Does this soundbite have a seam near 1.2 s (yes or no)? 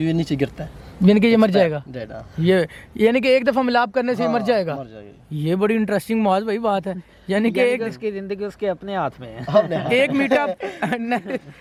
no